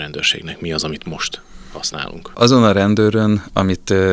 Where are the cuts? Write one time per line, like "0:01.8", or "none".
0:02.3